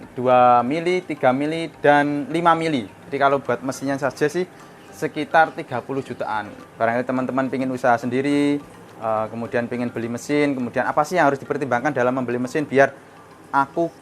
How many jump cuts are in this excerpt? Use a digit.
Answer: 2